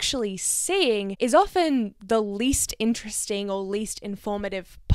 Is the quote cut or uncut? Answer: uncut